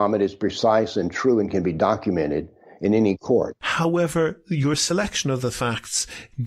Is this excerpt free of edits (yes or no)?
no